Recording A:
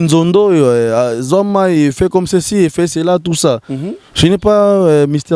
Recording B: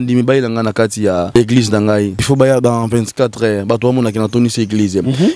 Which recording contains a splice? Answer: B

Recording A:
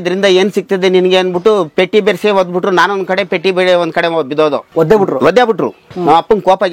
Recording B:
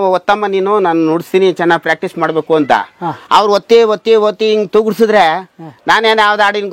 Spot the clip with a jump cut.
A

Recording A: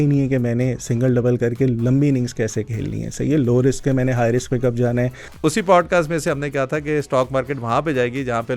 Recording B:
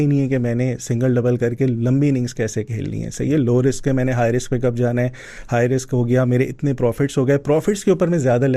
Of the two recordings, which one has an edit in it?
A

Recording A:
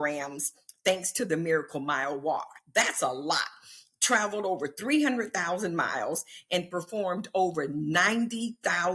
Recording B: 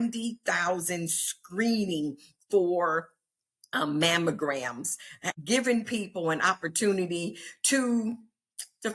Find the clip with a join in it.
B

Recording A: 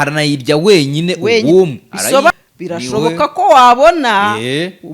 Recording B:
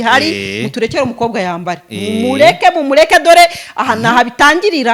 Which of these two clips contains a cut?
A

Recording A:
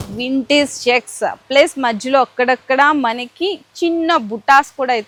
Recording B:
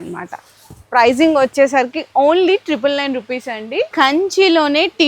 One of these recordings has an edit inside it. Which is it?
B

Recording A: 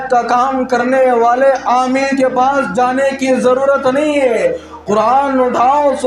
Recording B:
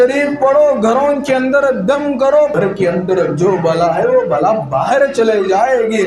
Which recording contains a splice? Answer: B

